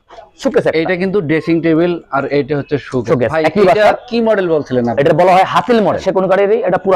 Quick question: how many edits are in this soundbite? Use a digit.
1